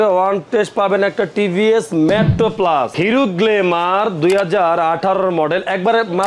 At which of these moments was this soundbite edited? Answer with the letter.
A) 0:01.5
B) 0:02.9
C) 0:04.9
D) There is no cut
B